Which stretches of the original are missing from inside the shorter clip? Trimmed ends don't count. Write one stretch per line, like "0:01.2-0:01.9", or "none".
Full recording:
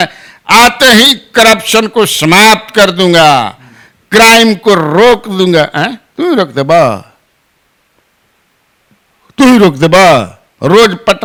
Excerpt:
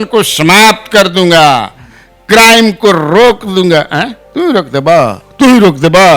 0:07.1-0:09.2